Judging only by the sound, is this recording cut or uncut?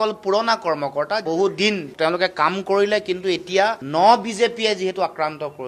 uncut